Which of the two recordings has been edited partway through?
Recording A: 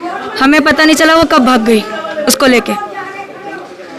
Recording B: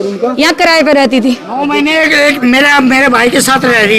B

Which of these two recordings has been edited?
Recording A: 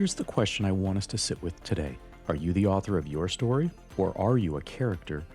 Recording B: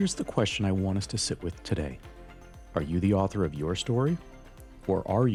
A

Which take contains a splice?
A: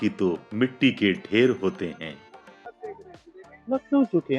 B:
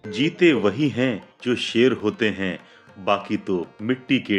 A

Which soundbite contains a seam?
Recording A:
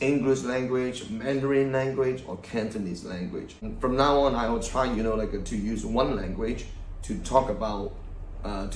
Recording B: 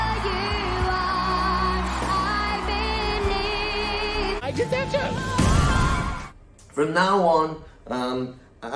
B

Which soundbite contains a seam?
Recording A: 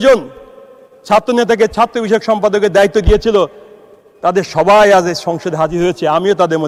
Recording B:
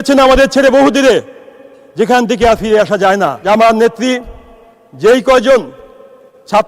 B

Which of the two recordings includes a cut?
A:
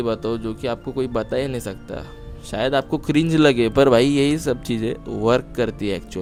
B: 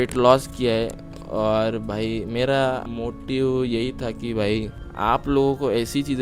B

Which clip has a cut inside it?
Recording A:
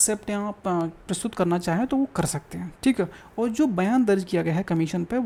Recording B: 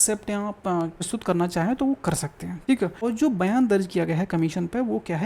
B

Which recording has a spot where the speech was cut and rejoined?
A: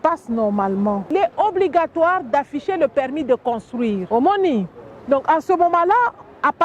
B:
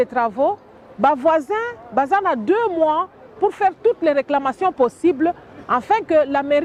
A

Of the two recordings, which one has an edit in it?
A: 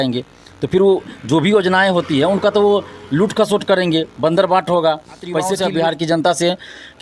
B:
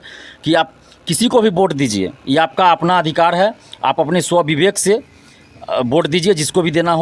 A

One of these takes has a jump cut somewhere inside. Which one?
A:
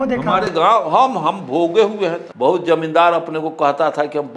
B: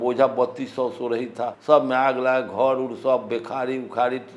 A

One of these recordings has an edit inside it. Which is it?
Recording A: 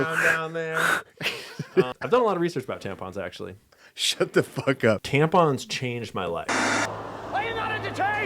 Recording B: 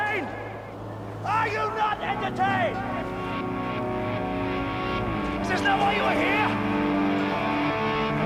A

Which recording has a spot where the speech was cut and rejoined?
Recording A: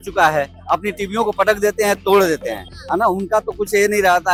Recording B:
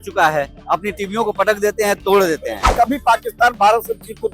B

